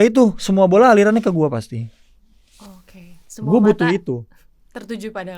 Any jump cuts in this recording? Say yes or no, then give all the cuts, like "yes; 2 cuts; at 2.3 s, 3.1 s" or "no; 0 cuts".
no; 0 cuts